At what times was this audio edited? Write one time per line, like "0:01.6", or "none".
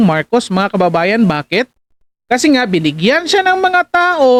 none